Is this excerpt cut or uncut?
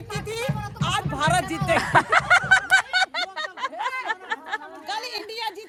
uncut